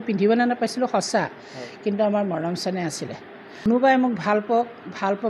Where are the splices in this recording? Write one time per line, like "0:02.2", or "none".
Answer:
0:03.7